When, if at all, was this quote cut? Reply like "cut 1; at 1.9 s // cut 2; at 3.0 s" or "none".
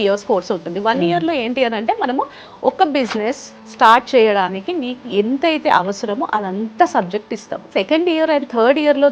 cut 1; at 7.7 s